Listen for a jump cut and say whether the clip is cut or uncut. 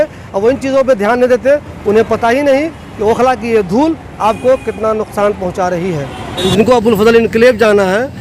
cut